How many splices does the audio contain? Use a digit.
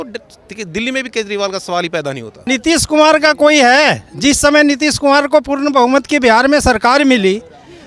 1